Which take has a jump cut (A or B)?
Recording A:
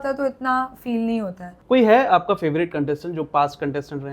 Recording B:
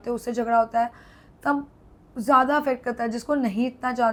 A